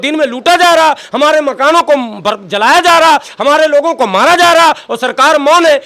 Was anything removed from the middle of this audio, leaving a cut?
no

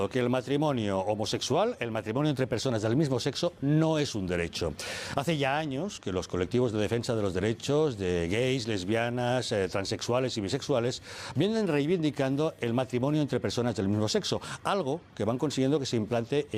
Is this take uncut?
no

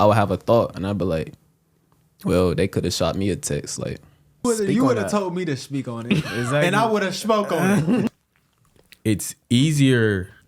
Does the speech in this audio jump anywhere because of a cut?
yes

